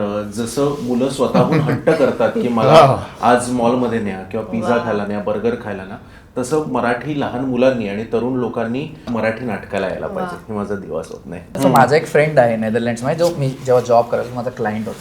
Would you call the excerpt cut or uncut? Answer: cut